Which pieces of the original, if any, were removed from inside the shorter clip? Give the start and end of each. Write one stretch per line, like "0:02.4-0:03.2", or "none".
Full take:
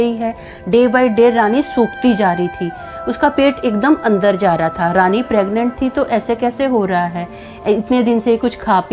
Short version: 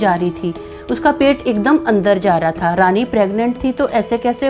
none

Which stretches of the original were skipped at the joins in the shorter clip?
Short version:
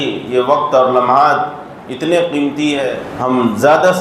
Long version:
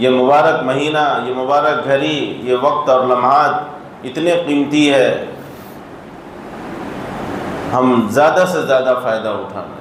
0:05.2-0:07.6

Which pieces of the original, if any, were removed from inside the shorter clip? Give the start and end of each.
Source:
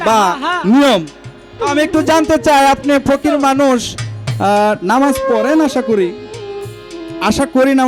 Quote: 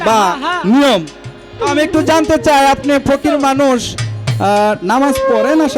none

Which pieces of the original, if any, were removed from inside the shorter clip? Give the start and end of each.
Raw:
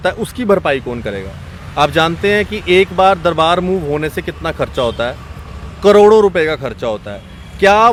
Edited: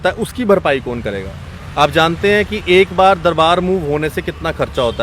none

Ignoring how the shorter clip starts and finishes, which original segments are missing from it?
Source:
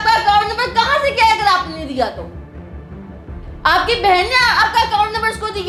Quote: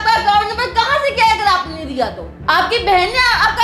0:02.3-0:03.4

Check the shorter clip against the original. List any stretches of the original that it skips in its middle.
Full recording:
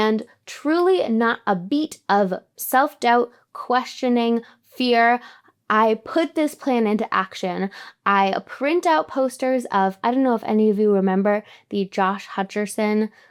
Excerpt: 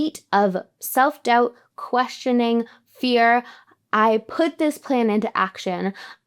none

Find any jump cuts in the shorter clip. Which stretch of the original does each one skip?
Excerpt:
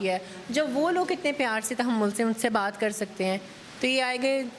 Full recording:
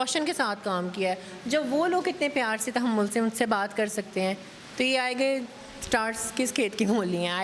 none

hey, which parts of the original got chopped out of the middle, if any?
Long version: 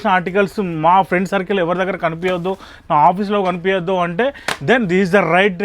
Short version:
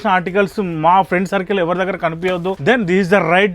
0:02.6-0:04.6

